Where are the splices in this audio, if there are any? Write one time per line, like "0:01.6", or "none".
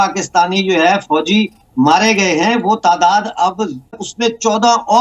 0:03.9